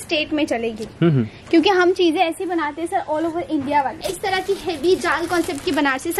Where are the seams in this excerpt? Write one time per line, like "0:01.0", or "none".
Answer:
0:04.1